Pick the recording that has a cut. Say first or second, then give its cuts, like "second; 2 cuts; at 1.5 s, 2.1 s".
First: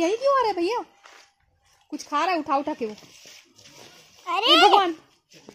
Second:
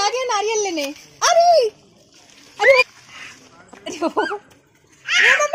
second; 1 cut; at 2.8 s